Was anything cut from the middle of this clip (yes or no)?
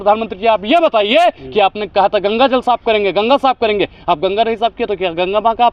no